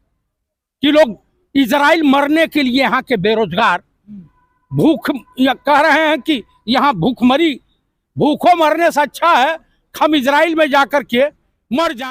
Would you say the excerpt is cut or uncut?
uncut